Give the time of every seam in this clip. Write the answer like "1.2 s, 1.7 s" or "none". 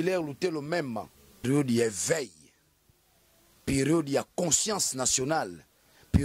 1.4 s

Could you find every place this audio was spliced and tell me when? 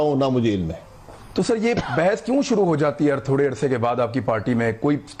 1.2 s

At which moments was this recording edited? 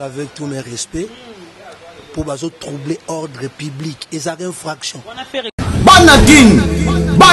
5.5 s

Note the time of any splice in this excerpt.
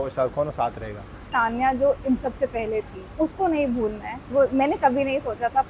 1.3 s, 3.1 s, 4.3 s

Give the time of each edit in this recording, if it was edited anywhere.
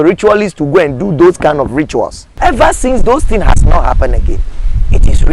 2.2 s

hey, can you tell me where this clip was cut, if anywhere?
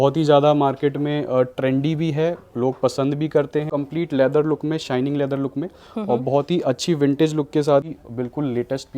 3.7 s, 7.9 s

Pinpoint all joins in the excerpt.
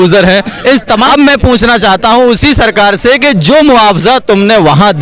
1.0 s

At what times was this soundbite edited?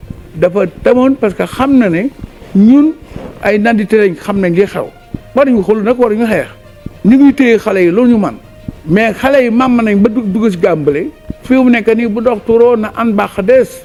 none

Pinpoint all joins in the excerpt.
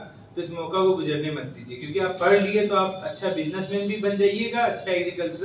none

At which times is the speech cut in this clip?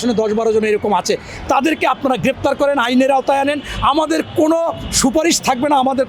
none

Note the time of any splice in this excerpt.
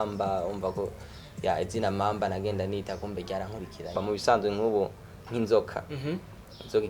3.9 s

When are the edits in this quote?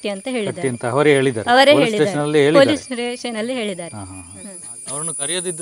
4.2 s

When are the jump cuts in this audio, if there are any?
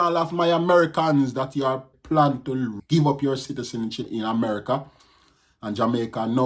2.2 s

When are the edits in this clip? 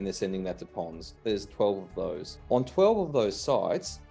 2.3 s

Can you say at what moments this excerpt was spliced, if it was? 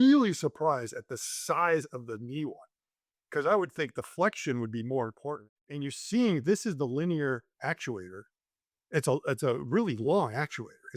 5.3 s

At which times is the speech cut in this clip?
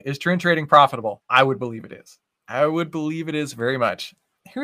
1.2 s

